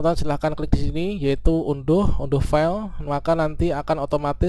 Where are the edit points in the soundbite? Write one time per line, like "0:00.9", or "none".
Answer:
none